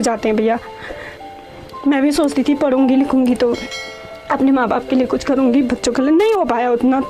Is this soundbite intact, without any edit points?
no; 1 cut; at 1.2 s

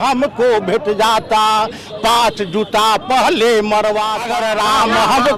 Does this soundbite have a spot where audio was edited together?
yes; 1 cut; at 4.2 s

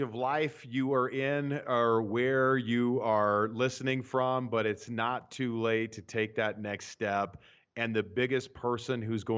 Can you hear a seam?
no; 0 cuts

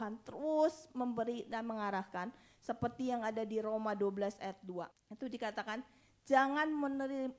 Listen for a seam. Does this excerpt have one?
yes; 1 cut; at 5.0 s

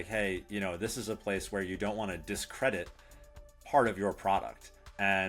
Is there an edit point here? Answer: no; 0 cuts

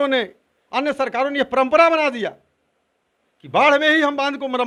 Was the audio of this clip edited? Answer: no; 0 cuts

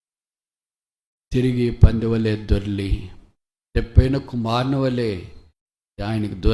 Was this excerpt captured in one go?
yes; 0 cuts

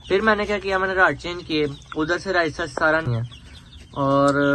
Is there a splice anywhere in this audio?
yes; 1 cut; at 3.1 s

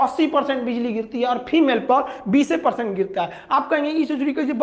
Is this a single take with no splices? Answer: yes; 0 cuts

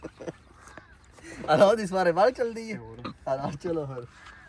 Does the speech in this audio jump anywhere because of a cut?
no; 0 cuts

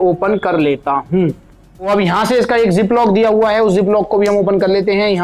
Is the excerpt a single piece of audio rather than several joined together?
no; 1 cut; at 1.9 s

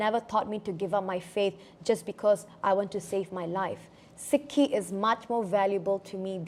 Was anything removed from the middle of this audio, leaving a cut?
no; 0 cuts

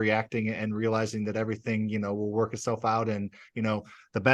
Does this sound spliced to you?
no; 0 cuts

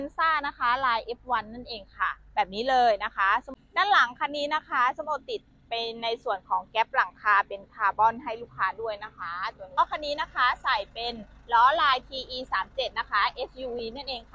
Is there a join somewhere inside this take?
yes; 2 cuts; at 3.5 s, 9.8 s

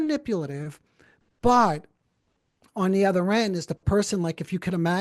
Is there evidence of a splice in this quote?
no; 0 cuts

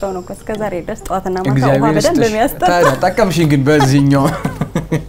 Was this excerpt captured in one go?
yes; 0 cuts

